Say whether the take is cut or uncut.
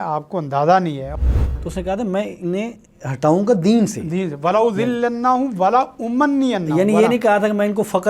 cut